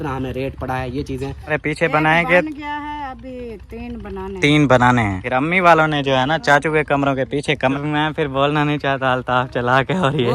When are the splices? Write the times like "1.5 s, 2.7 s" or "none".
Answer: 1.5 s, 5.2 s, 7.8 s

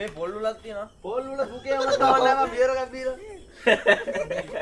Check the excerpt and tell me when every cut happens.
none

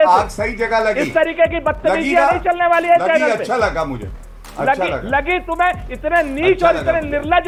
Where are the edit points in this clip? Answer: none

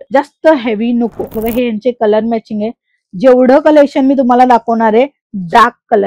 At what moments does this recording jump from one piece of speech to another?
1.4 s

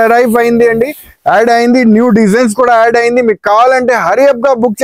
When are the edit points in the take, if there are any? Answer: none

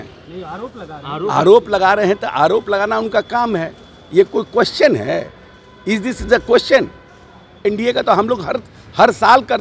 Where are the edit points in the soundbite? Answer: 7.6 s

